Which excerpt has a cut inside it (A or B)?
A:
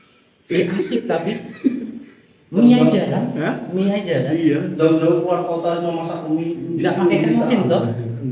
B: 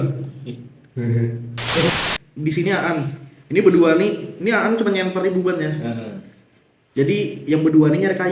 B